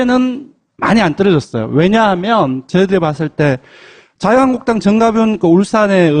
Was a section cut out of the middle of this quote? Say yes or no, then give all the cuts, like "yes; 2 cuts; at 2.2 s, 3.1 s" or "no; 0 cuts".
yes; 1 cut; at 3.5 s